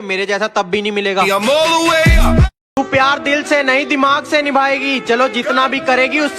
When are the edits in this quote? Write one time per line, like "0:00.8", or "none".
0:02.5